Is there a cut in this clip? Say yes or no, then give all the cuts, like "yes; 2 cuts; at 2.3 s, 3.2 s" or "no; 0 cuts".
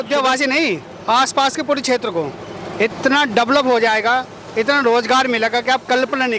no; 0 cuts